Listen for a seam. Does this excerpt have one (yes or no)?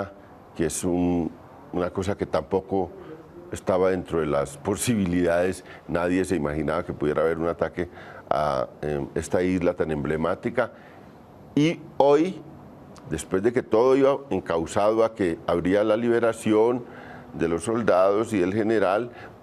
yes